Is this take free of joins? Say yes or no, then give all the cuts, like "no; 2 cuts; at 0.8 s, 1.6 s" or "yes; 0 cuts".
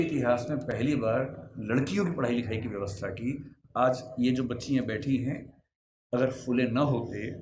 yes; 0 cuts